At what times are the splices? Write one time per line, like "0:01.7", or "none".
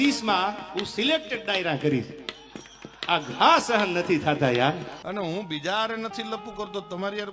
0:05.1